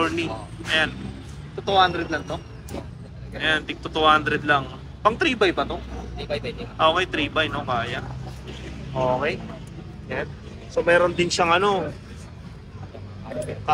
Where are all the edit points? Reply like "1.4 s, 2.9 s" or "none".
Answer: none